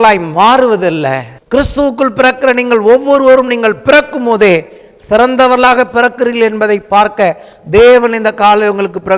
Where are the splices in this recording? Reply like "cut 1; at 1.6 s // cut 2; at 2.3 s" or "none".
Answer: cut 1; at 1.3 s